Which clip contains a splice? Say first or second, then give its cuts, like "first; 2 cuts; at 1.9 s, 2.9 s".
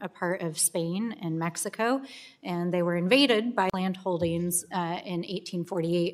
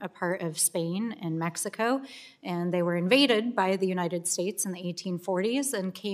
second; 1 cut; at 3.7 s